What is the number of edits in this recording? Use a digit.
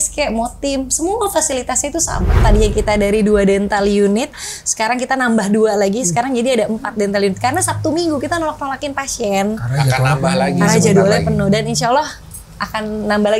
1